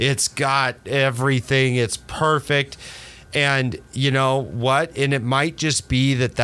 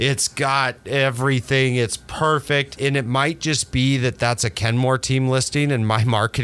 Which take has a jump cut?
second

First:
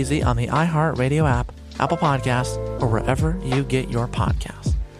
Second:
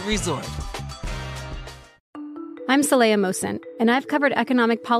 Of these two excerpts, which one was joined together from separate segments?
second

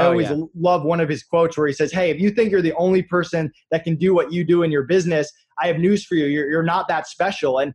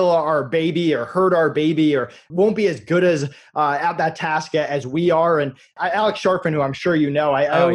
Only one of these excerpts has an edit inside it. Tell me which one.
second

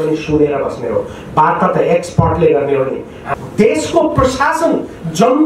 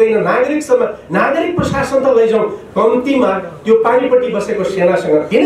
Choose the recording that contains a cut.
first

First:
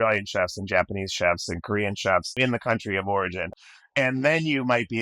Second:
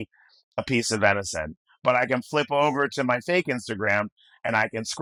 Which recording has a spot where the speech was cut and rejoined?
first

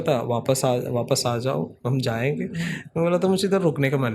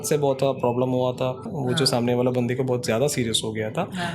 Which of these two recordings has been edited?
second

